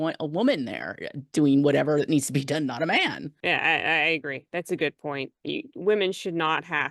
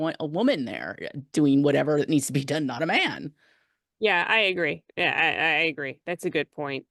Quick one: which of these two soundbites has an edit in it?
first; 1 cut; at 3.3 s

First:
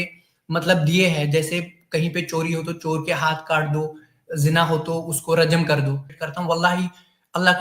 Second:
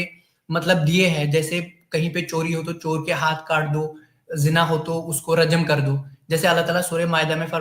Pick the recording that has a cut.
first; 1 cut; at 6.1 s

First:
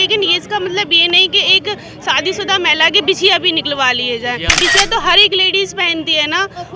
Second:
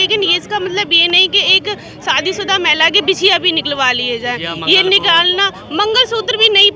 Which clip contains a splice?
first; 1 cut; at 4.6 s

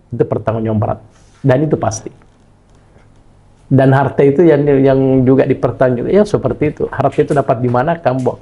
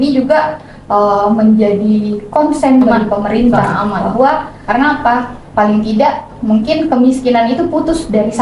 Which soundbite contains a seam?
second; 1 cut; at 4.5 s

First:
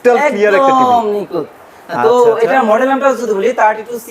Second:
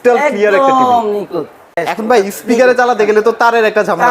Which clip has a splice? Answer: second; 1 cut; at 1.9 s

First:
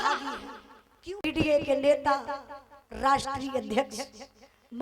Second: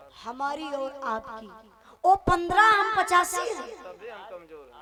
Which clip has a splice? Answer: first; 1 cut; at 1.2 s

